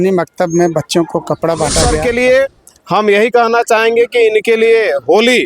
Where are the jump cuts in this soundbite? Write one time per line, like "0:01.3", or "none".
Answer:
0:01.8